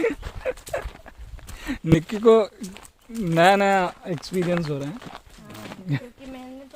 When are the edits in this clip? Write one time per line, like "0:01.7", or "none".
none